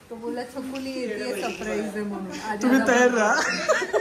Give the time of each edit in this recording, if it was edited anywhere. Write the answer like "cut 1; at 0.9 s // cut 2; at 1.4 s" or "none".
none